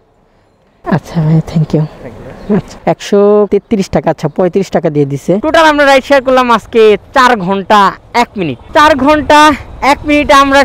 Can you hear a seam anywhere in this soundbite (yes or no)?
yes